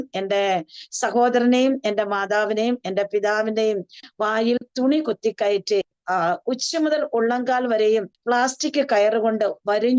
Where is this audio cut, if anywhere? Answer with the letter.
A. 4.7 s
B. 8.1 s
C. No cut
B